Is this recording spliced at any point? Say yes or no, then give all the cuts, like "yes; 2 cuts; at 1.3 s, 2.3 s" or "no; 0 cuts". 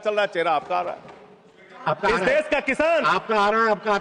no; 0 cuts